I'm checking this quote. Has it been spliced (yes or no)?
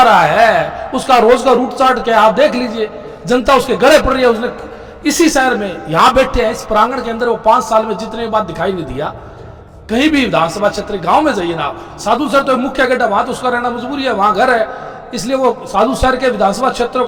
no